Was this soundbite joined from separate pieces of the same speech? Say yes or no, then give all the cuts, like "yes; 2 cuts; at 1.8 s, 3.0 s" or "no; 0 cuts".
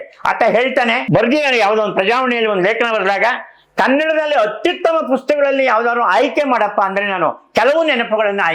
yes; 1 cut; at 1.0 s